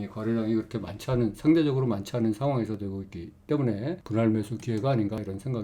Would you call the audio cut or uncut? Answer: uncut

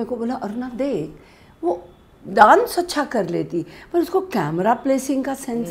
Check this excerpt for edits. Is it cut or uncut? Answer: uncut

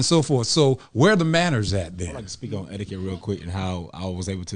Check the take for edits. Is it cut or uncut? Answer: cut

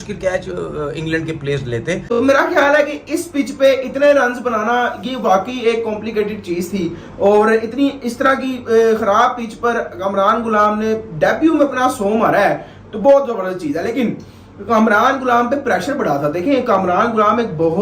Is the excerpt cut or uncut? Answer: cut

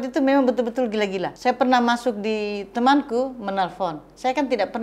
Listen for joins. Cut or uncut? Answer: cut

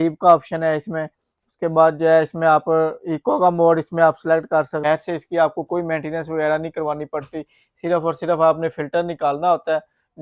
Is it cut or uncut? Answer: cut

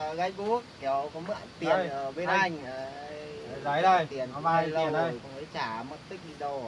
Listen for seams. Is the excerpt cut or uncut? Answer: uncut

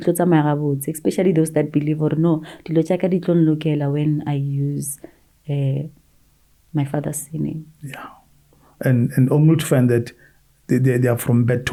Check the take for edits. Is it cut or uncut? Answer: uncut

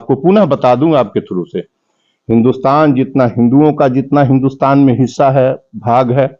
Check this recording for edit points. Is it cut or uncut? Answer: uncut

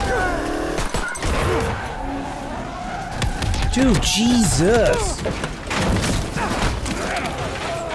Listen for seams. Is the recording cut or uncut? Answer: uncut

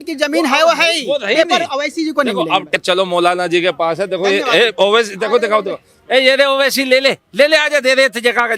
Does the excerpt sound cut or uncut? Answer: cut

